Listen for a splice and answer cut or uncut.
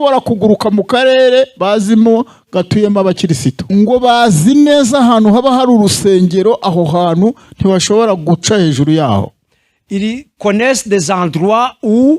cut